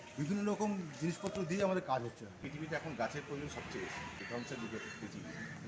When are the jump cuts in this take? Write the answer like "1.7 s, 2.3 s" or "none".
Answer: 2.5 s, 4.1 s